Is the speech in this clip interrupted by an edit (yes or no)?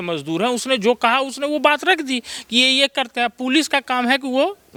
no